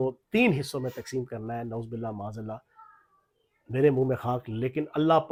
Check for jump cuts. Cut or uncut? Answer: uncut